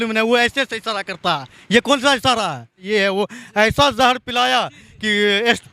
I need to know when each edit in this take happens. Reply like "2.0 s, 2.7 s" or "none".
2.8 s